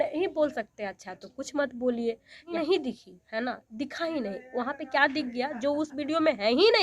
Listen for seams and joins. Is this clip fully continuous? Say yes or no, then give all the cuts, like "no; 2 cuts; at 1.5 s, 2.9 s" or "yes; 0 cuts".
no; 1 cut; at 2.5 s